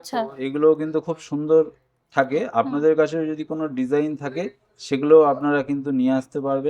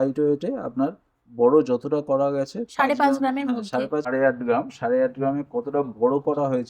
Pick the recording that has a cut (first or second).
second